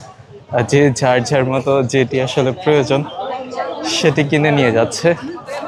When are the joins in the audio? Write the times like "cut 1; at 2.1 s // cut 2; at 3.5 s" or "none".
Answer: none